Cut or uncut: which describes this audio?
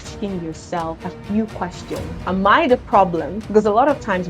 cut